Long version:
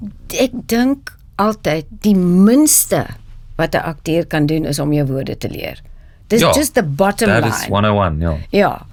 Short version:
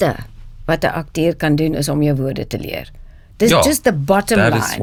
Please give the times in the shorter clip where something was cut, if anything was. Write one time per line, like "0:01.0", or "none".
none